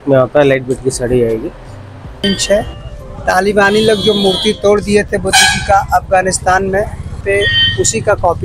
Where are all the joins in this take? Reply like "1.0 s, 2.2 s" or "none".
2.2 s, 7.2 s